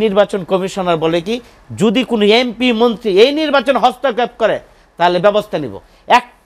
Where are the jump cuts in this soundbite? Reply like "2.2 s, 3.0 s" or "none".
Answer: none